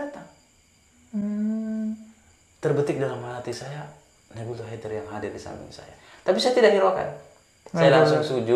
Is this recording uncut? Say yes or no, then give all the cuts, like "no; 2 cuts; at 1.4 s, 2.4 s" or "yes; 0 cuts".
yes; 0 cuts